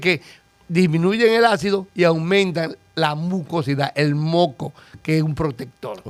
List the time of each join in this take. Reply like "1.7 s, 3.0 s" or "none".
none